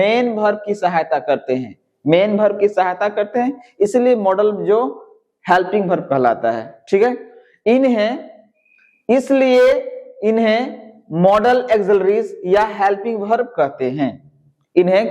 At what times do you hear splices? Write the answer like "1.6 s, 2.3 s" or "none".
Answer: none